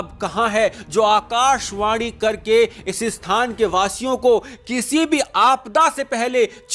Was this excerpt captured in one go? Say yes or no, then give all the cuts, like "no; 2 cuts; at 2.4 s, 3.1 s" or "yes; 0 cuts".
yes; 0 cuts